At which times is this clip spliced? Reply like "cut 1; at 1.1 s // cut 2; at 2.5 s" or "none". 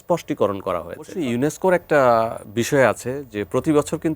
cut 1; at 1.2 s